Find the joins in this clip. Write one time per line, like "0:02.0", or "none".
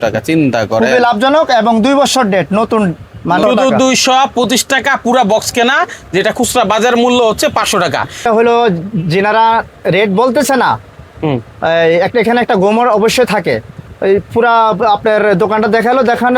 0:03.4
0:08.2